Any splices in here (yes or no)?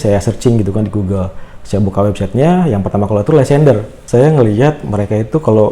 yes